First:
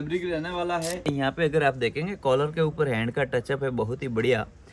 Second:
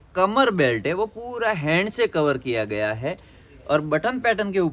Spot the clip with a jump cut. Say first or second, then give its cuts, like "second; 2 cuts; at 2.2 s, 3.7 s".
first; 1 cut; at 1.0 s